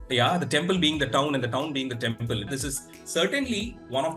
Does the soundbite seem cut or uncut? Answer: cut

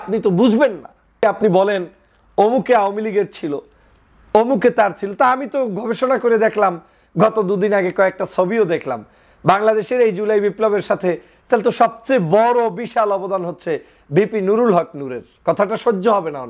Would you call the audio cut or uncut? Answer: cut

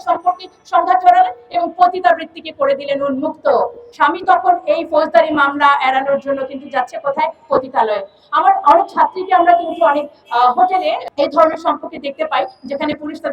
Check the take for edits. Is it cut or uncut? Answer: cut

